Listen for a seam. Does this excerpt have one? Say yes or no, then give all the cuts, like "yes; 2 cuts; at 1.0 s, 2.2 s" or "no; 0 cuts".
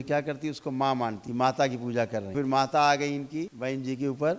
yes; 3 cuts; at 1.2 s, 2.3 s, 3.5 s